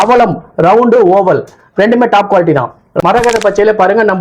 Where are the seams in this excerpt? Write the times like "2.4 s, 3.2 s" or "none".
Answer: 2.9 s